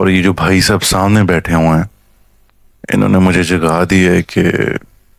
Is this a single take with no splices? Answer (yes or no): yes